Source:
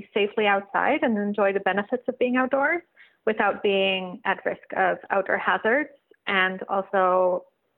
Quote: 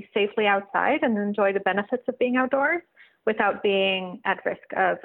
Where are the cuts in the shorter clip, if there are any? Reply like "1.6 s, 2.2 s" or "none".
none